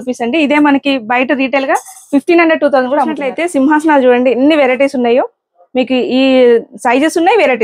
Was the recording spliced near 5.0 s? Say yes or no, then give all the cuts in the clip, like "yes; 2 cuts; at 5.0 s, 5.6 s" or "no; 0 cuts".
no; 1 cut; at 3.3 s